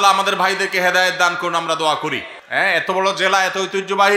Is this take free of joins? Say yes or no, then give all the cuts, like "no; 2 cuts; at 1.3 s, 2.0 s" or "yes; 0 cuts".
no; 1 cut; at 2.3 s